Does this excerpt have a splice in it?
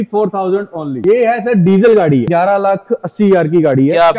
yes; 2 cuts; at 0.9 s, 2.3 s

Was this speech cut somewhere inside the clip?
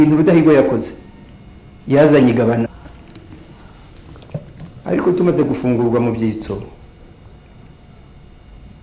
yes; 1 cut; at 2.7 s

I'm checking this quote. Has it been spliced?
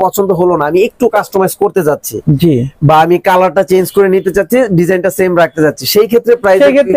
no; 0 cuts

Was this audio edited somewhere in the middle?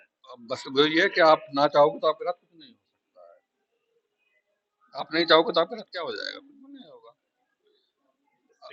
no; 0 cuts

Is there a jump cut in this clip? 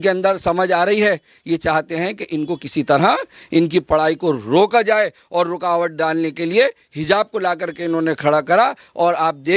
no; 0 cuts

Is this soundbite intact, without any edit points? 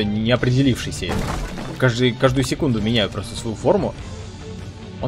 yes; 0 cuts

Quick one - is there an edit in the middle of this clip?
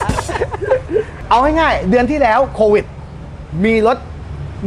yes; 1 cut; at 1.1 s

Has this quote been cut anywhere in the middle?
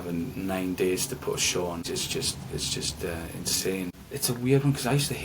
yes; 2 cuts; at 1.8 s, 4.0 s

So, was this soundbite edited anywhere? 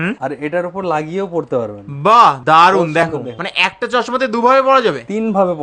no; 0 cuts

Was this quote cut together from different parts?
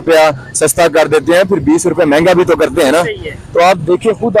no; 0 cuts

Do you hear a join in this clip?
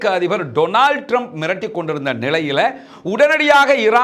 no; 0 cuts

